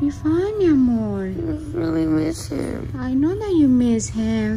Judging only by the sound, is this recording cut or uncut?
uncut